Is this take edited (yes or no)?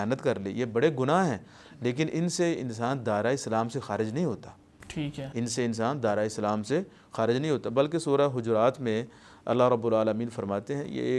no